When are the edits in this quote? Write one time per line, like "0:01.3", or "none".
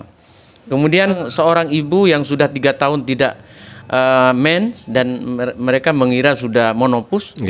0:01.2